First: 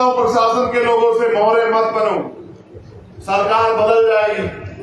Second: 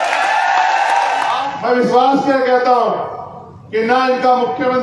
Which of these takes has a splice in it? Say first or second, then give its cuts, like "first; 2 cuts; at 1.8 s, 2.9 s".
second; 1 cut; at 1.4 s